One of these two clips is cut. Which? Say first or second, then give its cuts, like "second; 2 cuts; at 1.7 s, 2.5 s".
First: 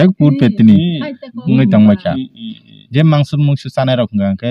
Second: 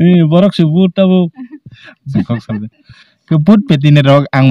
second; 1 cut; at 2.1 s